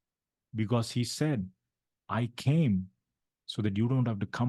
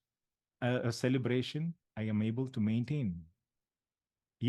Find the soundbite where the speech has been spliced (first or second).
second